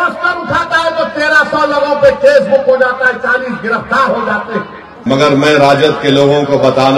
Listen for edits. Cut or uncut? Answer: cut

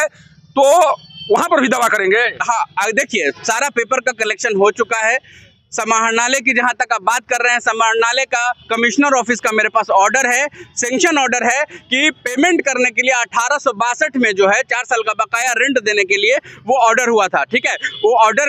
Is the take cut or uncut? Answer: uncut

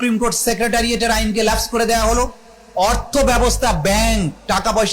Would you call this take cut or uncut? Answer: uncut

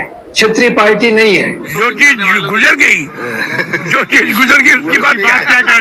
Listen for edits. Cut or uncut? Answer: cut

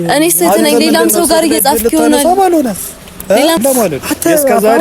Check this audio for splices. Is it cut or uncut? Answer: cut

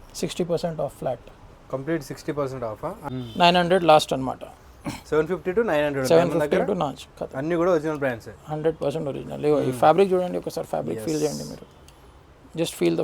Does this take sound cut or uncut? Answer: cut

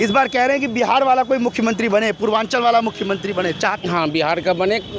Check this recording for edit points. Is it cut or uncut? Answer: cut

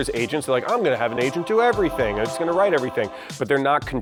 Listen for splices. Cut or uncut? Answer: uncut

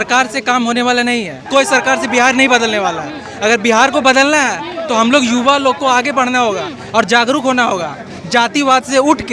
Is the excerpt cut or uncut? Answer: cut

